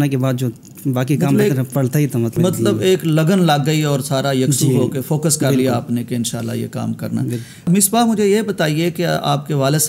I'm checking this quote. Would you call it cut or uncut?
uncut